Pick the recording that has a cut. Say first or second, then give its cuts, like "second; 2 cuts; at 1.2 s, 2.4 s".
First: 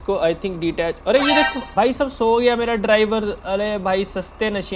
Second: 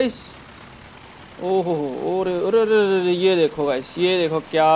first; 1 cut; at 1.6 s